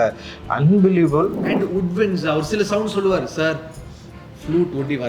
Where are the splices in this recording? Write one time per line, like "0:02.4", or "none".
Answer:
0:01.4